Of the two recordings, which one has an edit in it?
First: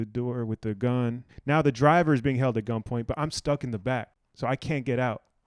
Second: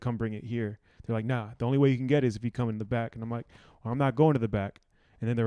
first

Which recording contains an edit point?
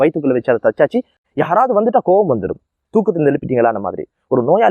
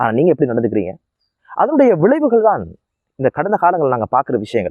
first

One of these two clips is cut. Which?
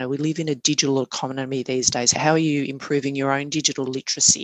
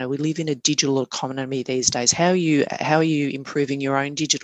first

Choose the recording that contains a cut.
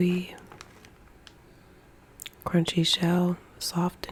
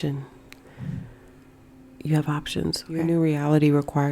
second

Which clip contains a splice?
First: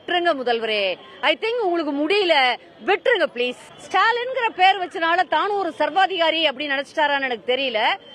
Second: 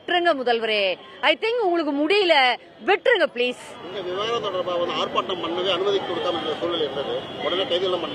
first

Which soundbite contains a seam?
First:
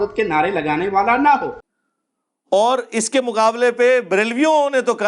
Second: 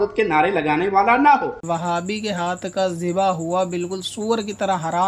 second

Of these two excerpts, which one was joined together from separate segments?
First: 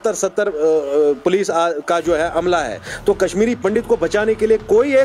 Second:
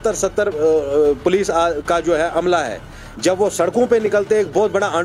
first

